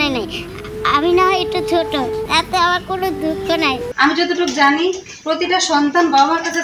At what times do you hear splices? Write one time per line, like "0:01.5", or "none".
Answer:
0:02.3
0:03.9